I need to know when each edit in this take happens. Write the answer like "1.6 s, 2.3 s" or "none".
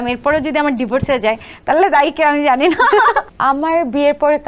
3.3 s